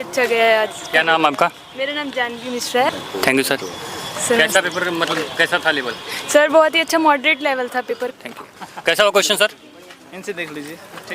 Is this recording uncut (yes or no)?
no